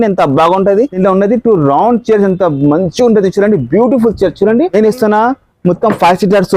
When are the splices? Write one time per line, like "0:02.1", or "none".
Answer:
0:00.9
0:04.7